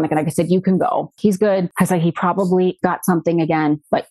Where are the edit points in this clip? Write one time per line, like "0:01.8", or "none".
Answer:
0:01.1